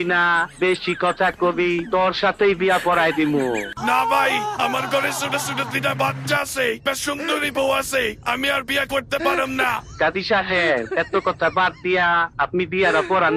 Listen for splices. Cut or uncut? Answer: cut